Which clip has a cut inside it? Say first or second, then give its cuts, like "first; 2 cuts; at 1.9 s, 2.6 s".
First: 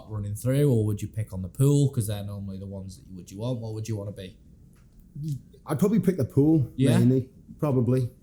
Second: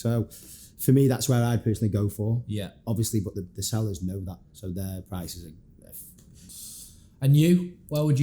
second; 1 cut; at 6.4 s